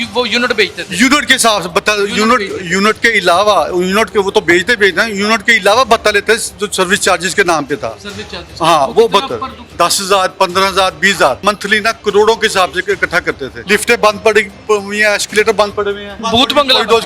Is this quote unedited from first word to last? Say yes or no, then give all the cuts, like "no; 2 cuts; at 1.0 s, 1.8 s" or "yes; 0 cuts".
no; 4 cuts; at 9.7 s, 11.4 s, 13.5 s, 16.2 s